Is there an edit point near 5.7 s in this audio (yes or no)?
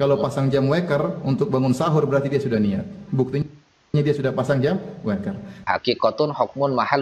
yes